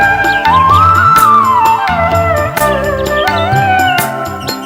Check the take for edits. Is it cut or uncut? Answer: uncut